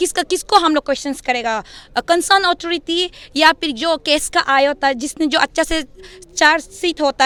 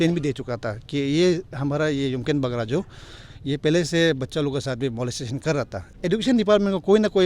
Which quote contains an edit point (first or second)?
second